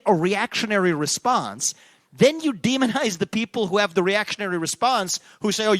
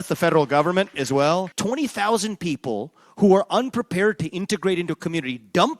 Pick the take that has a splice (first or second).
second